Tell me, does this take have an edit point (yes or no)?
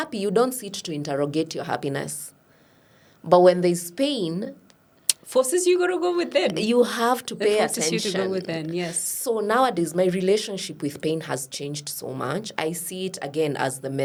no